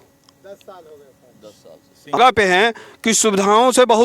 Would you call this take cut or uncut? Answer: cut